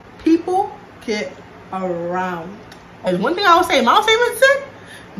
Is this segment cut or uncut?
cut